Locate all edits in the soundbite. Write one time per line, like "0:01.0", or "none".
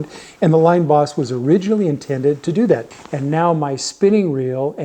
0:02.8